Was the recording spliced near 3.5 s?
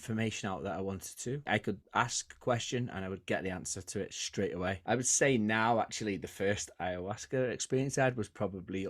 no; 2 cuts; at 1.5 s, 4.8 s

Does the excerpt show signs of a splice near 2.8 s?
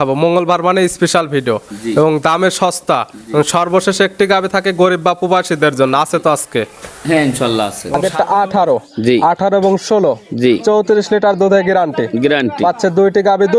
no; 1 cut; at 8.0 s

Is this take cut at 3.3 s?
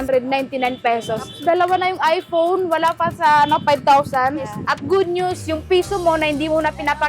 no; 2 cuts; at 1.3 s, 4.6 s

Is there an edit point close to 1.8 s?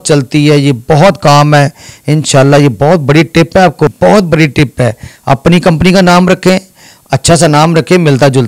no; 1 cut; at 3.9 s

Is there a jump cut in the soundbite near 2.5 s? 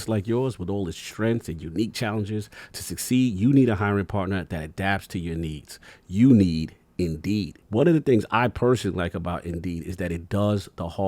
no; 1 cut; at 7.6 s

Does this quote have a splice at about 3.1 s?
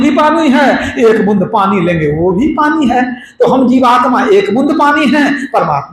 no; 0 cuts

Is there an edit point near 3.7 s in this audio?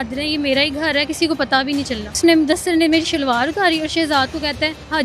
no; 1 cut; at 2.2 s

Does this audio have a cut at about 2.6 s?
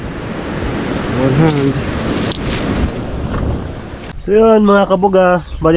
no; 1 cut; at 4.1 s

